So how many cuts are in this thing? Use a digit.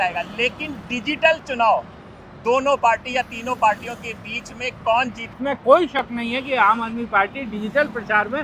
1